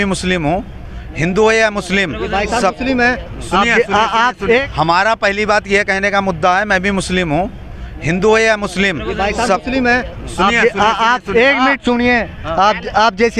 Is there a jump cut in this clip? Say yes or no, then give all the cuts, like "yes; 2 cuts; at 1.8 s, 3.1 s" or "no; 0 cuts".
no; 0 cuts